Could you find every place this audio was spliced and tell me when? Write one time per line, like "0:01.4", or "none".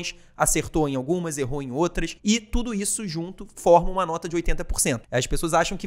0:02.1
0:05.0